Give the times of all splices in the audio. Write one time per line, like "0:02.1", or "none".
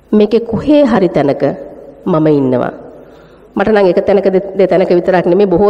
none